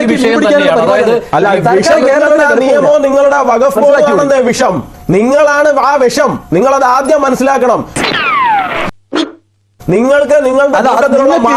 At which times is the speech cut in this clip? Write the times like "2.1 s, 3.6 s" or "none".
none